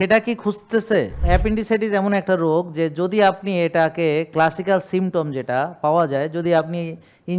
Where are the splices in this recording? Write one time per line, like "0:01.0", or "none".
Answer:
0:01.2